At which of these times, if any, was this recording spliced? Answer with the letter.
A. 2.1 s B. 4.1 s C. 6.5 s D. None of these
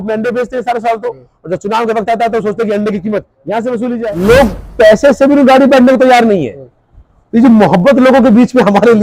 B